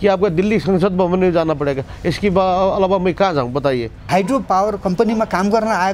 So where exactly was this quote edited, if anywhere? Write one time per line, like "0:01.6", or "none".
0:04.4